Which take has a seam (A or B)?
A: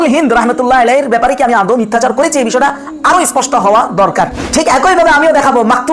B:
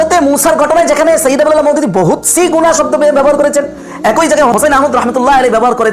A